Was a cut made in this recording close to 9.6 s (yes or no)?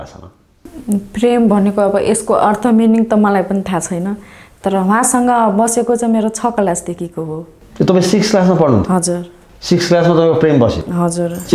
no